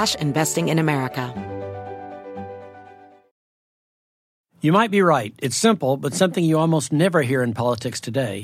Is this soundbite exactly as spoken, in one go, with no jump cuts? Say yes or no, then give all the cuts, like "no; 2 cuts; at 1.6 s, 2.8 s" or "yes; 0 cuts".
no; 1 cut; at 1.3 s